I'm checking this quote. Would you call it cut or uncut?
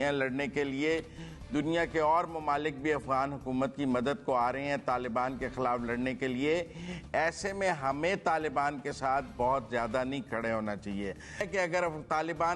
cut